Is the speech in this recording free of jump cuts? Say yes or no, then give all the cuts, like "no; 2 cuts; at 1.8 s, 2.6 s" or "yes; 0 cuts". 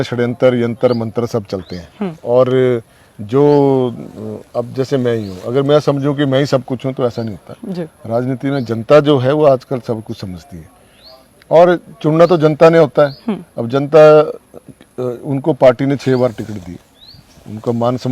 yes; 0 cuts